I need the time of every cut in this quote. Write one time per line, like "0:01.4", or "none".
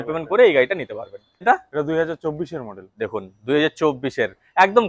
0:01.4